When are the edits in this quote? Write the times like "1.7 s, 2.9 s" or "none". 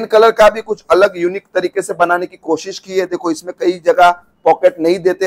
none